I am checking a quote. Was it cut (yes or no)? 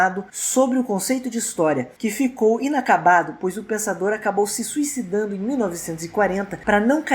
no